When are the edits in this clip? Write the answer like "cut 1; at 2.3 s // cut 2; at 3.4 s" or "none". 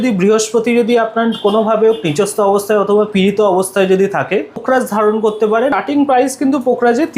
cut 1; at 4.6 s // cut 2; at 5.8 s